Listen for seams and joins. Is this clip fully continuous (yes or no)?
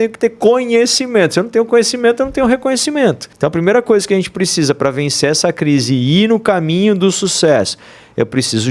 no